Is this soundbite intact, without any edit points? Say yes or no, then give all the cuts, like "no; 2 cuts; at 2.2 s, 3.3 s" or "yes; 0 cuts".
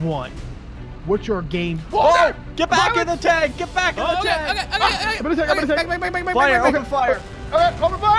yes; 0 cuts